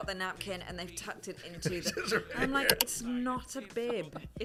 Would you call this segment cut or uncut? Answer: uncut